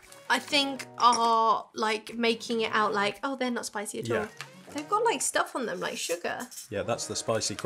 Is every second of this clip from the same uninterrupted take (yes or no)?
yes